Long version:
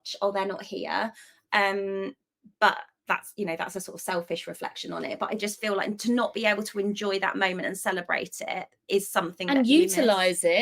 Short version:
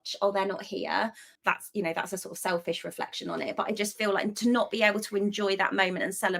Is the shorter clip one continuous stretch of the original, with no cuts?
no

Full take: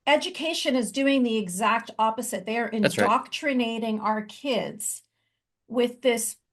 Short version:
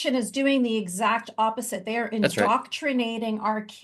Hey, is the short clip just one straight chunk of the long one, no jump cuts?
yes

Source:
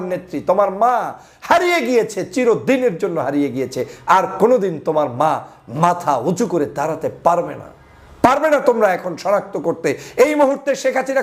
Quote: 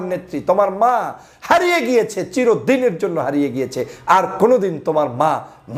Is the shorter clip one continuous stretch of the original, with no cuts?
yes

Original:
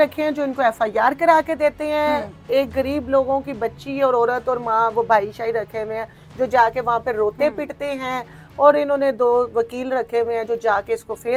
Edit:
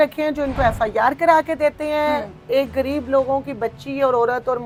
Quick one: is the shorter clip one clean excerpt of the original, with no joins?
yes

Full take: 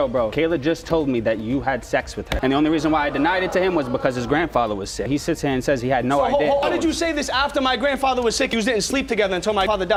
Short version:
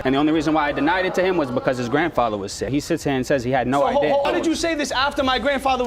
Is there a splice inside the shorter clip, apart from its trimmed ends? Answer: no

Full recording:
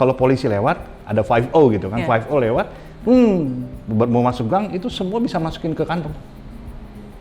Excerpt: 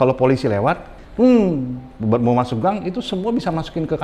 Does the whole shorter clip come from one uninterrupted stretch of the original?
no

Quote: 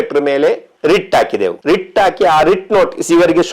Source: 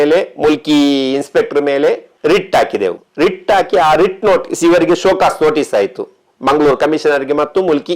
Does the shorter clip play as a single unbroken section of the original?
no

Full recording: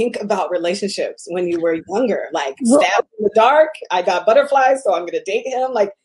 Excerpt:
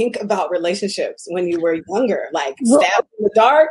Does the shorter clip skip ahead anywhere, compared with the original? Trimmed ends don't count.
no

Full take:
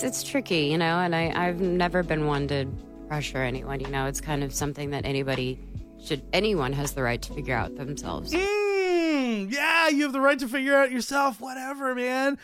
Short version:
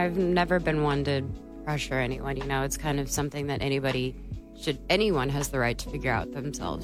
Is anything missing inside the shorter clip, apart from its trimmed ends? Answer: no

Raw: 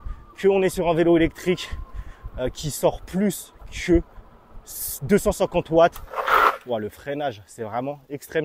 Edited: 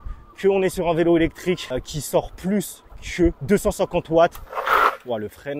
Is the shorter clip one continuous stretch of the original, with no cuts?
no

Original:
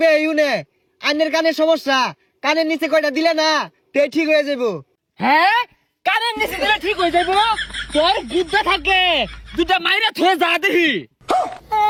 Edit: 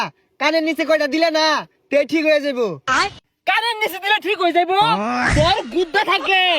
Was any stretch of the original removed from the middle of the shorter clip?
yes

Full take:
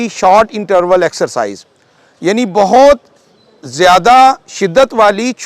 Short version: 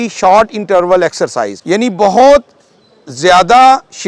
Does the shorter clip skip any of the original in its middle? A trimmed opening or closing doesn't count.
yes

